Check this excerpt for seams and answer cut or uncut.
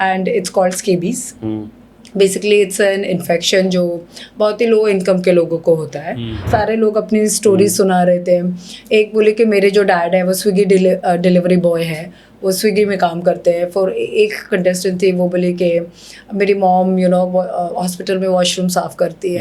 cut